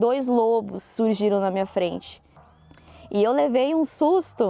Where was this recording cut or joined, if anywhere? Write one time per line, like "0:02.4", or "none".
0:02.7